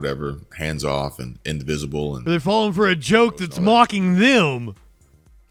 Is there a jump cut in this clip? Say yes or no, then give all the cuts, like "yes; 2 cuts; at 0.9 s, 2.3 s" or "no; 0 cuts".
no; 0 cuts